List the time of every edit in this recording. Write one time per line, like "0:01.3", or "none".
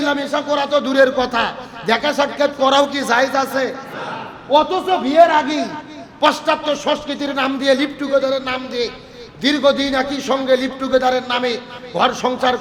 none